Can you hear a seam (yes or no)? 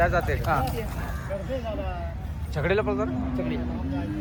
no